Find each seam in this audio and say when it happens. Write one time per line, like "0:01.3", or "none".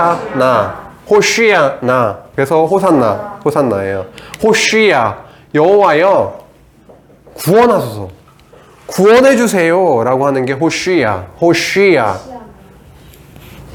none

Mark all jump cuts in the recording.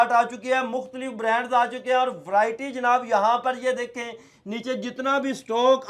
none

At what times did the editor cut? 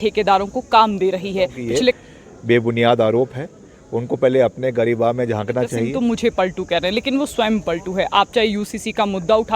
0:01.9
0:05.8

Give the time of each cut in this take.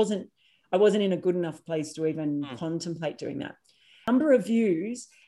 0:04.1

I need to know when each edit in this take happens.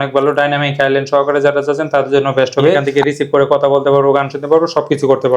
0:02.8

